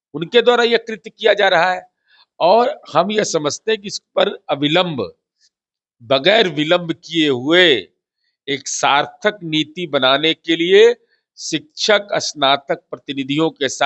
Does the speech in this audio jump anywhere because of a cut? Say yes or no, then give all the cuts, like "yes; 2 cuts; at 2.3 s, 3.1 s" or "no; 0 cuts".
no; 0 cuts